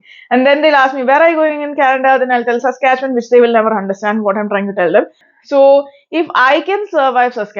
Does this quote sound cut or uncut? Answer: cut